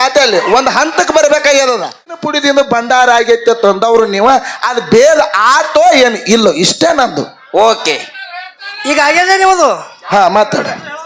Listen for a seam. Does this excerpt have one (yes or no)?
yes